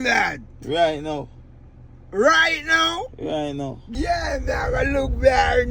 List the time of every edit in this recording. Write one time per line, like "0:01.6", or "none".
0:03.8